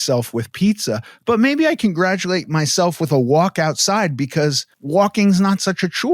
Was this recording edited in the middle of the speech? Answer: yes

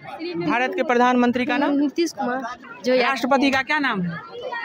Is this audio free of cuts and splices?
no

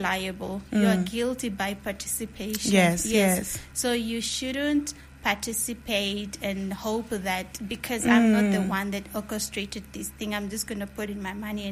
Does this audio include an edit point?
no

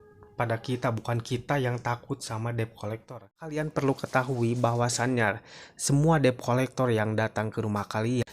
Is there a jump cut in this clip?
yes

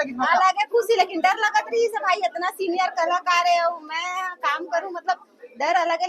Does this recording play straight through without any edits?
yes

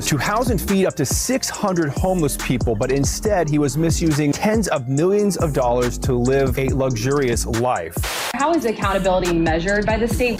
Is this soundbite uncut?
yes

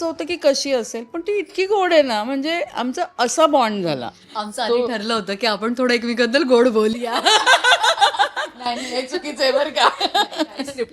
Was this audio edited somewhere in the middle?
no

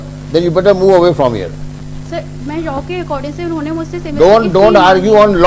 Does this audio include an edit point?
yes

